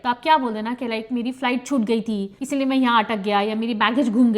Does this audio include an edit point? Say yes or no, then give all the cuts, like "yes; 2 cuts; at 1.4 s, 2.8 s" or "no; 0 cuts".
no; 0 cuts